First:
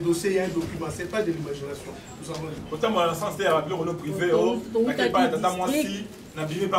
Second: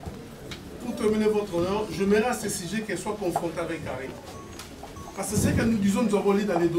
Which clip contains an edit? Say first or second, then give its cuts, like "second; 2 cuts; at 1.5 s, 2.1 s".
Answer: first; 1 cut; at 2.6 s